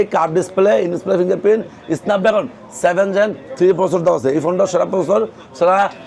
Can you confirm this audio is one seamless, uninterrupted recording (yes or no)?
yes